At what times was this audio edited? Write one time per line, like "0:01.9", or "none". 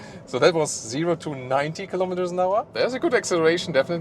0:02.7